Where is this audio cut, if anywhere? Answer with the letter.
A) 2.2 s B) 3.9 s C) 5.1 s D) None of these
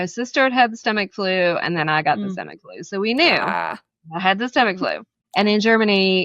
C